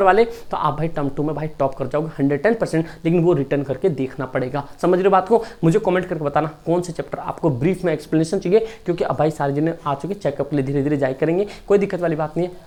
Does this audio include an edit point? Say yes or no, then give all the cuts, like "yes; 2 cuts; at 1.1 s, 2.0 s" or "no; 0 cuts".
no; 0 cuts